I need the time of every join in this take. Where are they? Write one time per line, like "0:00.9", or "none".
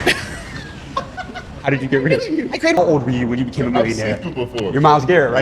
0:02.8